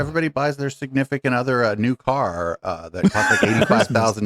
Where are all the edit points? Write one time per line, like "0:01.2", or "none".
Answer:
none